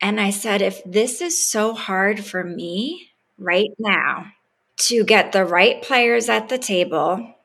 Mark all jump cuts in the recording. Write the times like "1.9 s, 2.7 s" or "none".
4.3 s